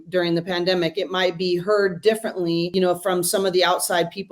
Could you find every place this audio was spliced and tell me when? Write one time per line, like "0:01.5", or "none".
0:02.7